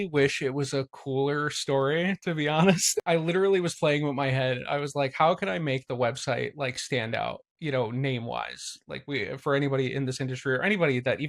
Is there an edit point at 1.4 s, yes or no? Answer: no